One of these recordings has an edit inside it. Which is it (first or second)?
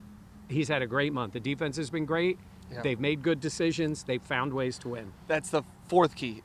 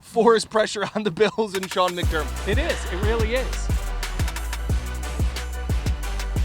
second